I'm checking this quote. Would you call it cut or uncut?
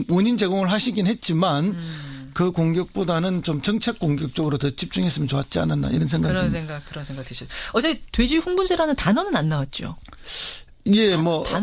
cut